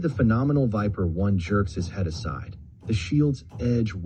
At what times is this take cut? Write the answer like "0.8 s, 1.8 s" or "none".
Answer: none